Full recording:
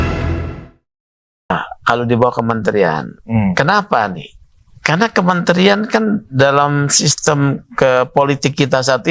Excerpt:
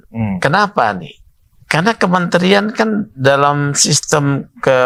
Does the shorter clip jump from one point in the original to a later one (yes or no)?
no